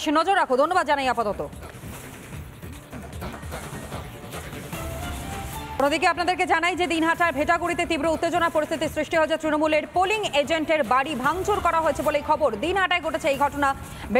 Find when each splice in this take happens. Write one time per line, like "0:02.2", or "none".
0:05.8